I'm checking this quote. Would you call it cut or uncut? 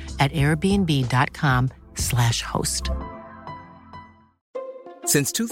uncut